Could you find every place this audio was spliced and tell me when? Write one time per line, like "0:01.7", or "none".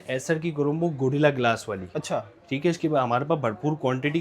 none